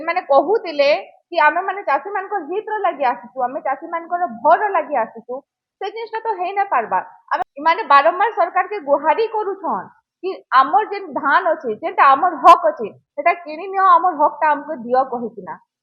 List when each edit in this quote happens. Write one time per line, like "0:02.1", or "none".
0:07.4